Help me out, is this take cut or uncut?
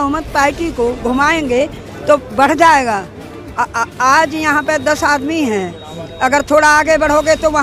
uncut